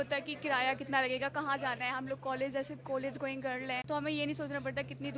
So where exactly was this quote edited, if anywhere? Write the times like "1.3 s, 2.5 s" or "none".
3.8 s